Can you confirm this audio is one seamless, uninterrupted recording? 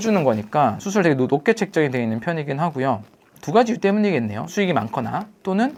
yes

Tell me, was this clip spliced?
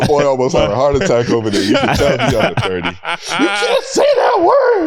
no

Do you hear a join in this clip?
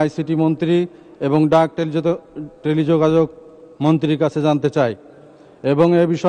no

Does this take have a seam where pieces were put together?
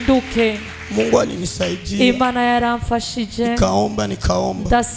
no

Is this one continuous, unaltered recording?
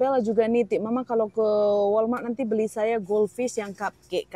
yes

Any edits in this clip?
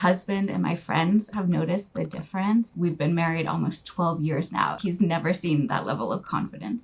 yes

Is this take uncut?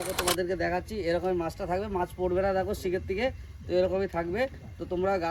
yes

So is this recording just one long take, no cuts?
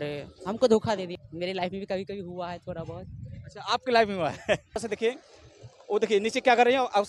no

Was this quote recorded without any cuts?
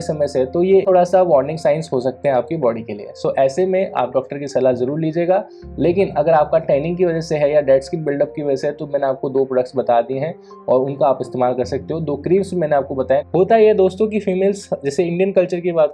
no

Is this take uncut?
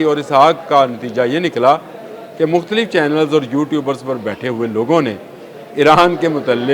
yes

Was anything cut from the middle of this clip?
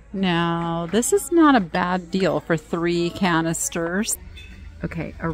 yes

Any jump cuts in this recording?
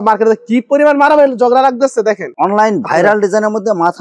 no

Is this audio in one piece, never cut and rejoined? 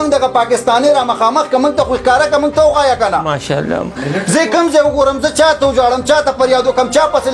yes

